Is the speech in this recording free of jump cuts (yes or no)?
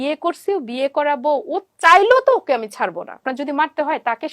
no